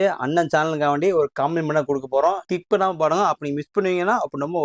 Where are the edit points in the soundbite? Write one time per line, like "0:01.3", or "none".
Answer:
0:02.5